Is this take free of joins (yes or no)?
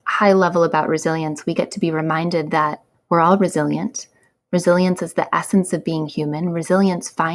no